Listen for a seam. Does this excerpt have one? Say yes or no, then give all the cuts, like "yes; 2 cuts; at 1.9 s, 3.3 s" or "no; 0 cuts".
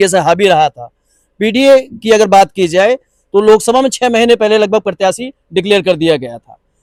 no; 0 cuts